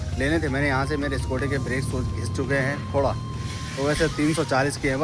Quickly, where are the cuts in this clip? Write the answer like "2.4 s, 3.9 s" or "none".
none

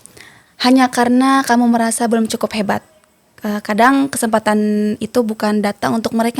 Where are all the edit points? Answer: none

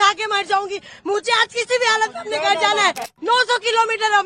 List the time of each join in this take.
3.1 s

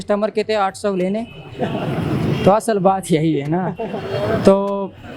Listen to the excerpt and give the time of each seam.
none

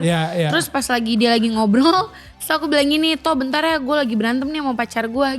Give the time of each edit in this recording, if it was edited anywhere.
none

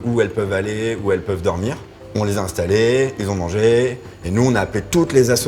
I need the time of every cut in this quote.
none

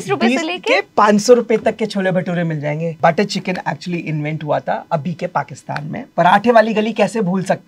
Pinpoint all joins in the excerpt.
3.0 s, 6.0 s

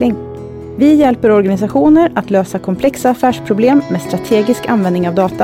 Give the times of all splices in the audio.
none

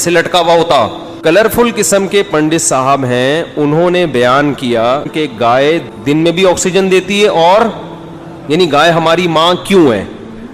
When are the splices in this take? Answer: 1.1 s, 5.1 s, 5.9 s

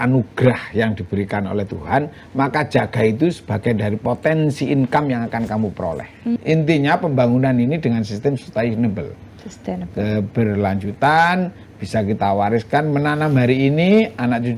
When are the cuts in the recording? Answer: 6.4 s

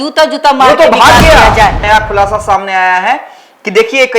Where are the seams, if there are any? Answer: 1.8 s

